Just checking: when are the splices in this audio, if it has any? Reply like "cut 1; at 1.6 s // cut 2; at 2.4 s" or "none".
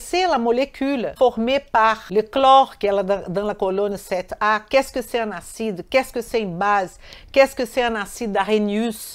cut 1; at 1.1 s // cut 2; at 2.0 s